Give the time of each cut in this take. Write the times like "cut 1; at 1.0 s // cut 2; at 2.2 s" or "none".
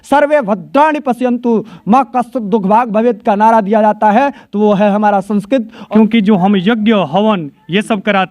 cut 1; at 5.8 s